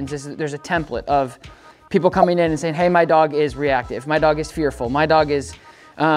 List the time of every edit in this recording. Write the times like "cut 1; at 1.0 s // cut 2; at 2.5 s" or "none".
none